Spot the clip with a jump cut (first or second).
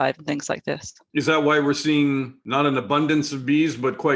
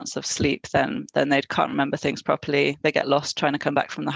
first